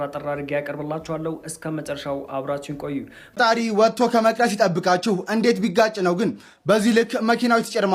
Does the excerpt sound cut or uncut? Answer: cut